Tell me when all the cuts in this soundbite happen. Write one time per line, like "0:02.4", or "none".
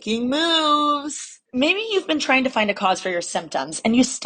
0:01.4